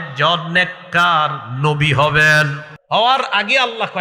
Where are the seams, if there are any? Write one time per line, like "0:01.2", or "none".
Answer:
0:02.7